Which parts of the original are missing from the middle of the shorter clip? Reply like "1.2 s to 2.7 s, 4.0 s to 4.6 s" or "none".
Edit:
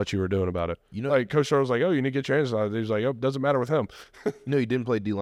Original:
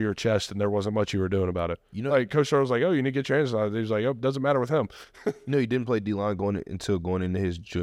none